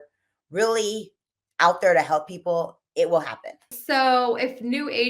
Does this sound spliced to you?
yes; 1 cut; at 3.8 s

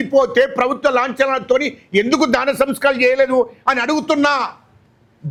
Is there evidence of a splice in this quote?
no; 0 cuts

